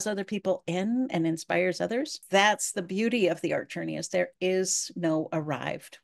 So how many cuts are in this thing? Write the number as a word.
one